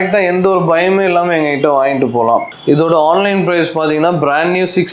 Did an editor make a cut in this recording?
yes; 1 cut; at 2.5 s

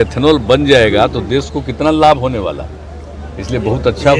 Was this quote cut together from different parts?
no; 0 cuts

